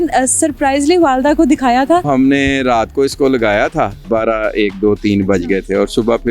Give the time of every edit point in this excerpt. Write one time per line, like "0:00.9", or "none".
0:02.1
0:04.0